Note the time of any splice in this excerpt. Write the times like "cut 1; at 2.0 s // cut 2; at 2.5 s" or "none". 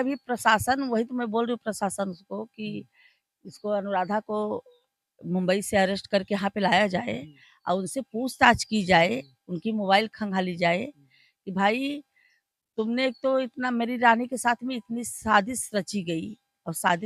none